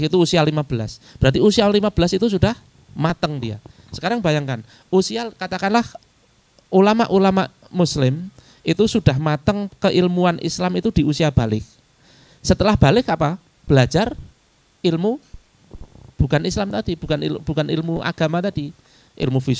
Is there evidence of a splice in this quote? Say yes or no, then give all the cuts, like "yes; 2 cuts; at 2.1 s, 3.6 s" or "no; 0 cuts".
no; 0 cuts